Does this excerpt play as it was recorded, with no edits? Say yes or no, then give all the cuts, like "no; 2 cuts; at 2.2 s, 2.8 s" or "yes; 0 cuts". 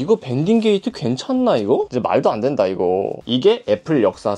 no; 1 cut; at 1.9 s